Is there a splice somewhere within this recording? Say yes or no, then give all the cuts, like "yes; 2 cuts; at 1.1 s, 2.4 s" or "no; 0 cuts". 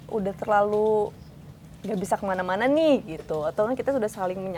no; 0 cuts